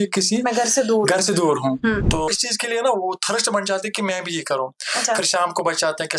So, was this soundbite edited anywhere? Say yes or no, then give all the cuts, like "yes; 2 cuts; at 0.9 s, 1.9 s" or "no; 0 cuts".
yes; 1 cut; at 2.2 s